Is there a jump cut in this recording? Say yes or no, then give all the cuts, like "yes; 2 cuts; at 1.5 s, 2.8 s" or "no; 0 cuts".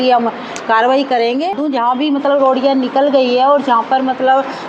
yes; 1 cut; at 1.5 s